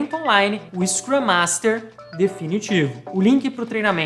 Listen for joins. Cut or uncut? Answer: cut